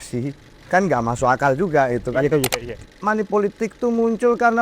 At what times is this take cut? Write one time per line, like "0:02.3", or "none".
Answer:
0:02.7